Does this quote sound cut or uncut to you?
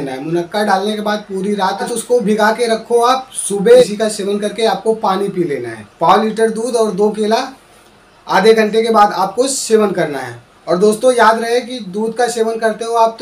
cut